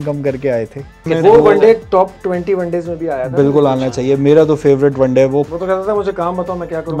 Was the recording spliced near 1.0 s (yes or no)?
yes